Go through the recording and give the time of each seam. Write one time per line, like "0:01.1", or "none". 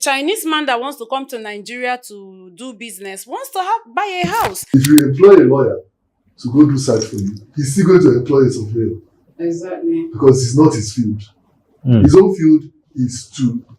0:04.6